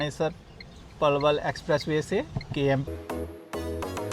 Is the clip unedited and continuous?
no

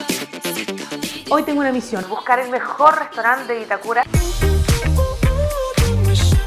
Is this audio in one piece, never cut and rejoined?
no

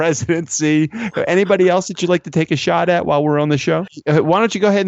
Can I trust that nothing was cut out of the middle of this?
no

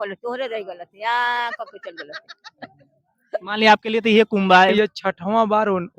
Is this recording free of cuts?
no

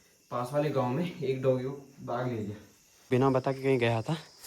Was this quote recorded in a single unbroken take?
no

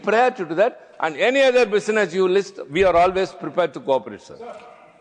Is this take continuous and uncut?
yes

